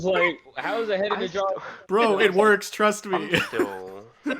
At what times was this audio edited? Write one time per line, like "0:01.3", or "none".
0:01.7